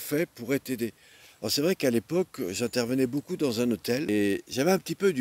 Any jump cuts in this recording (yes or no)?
yes